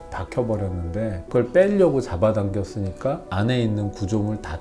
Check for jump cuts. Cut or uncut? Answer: cut